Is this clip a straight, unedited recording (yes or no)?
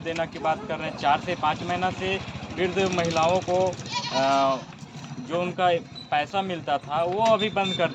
yes